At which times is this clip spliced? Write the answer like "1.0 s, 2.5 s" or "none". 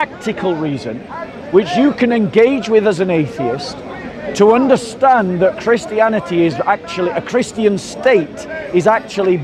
none